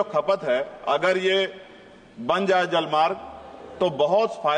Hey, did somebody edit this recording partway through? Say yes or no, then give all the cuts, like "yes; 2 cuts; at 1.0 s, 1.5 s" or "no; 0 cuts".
no; 0 cuts